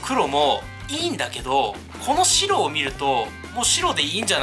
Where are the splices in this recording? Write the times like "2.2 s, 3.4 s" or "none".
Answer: 3.4 s